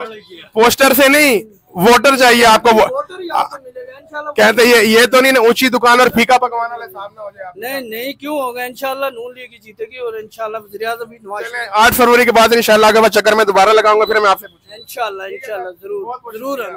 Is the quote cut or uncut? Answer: uncut